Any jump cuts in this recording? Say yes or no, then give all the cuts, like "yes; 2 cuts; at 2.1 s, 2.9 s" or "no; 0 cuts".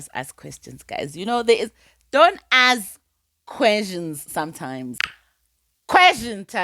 yes; 1 cut; at 5.0 s